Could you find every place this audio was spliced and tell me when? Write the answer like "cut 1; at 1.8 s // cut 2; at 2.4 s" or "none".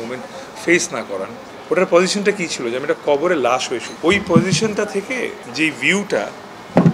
cut 1; at 1.4 s // cut 2; at 3.9 s // cut 3; at 5.4 s